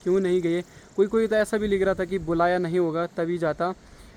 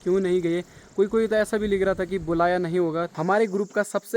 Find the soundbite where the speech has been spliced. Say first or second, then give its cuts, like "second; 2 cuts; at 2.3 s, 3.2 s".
second; 1 cut; at 3.1 s